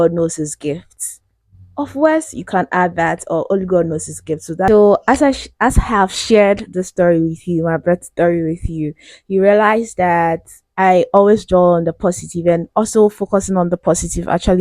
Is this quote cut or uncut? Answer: cut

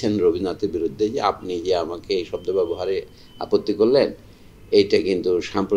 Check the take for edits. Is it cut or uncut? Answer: uncut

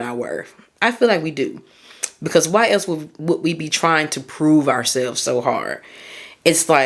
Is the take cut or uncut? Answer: uncut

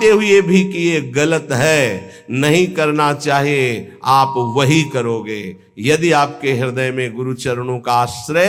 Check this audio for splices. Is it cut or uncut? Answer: uncut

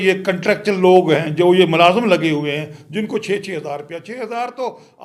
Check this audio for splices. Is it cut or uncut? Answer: uncut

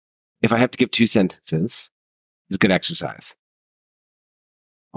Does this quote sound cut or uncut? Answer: uncut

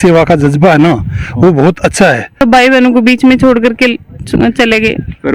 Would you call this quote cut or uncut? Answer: cut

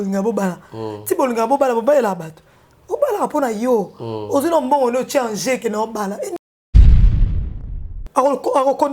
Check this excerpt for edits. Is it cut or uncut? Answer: cut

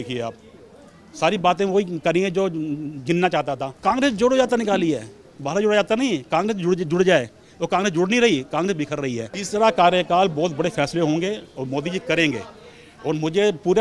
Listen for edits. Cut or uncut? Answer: cut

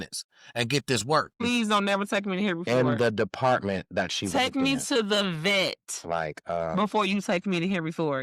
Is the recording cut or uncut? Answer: cut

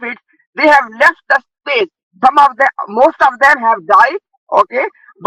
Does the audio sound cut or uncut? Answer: cut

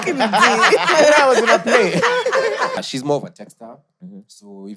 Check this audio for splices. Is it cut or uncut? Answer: cut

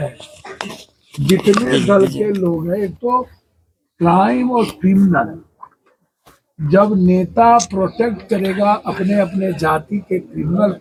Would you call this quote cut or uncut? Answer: uncut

